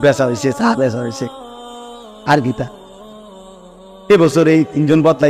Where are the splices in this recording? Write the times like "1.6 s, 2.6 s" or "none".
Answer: 2.7 s, 4.1 s